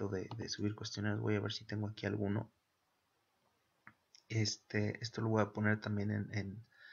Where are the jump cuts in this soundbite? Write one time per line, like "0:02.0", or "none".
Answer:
0:02.3